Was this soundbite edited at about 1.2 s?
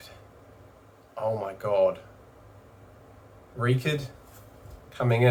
no; 0 cuts

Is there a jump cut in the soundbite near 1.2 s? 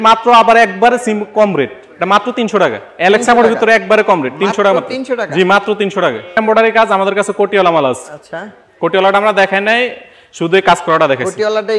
no; 1 cut; at 6.4 s

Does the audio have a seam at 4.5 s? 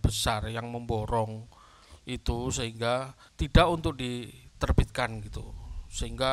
no; 1 cut; at 3.2 s

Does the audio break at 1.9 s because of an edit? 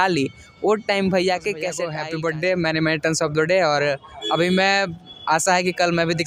yes; 1 cut; at 1.9 s

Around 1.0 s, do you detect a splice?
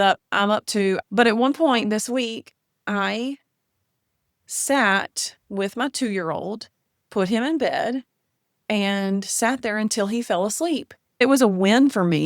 yes; 2 cuts; at 1.0 s, 11.2 s

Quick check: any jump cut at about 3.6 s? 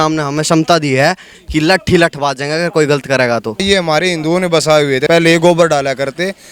yes; 2 cuts; at 3.6 s, 5.0 s

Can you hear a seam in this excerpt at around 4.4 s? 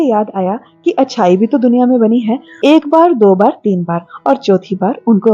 no; 1 cut; at 2.5 s

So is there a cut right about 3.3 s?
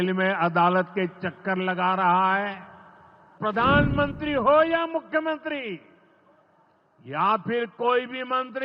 yes; 1 cut; at 3.3 s

